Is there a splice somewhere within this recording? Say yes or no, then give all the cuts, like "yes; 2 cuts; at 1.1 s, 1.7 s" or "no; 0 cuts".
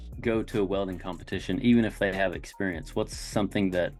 no; 0 cuts